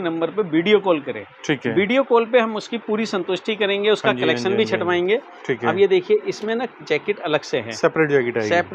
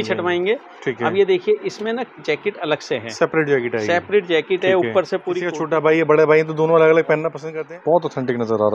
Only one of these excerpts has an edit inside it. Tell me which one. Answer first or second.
second